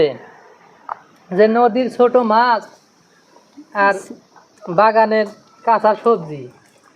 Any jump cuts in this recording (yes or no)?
no